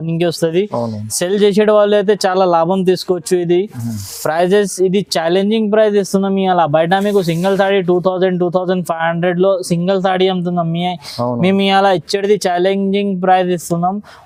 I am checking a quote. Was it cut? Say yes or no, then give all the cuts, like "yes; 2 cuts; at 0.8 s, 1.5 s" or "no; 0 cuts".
no; 0 cuts